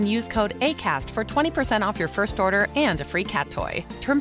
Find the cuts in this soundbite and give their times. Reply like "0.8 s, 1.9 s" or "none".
none